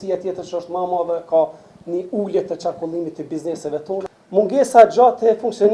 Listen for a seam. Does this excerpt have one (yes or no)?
yes